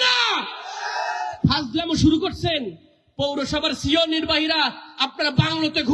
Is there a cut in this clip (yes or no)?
no